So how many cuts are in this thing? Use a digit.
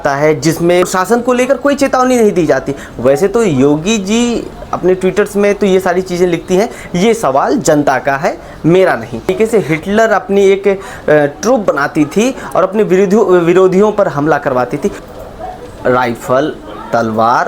3